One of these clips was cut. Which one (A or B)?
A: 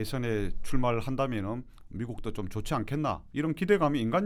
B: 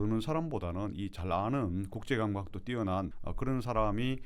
B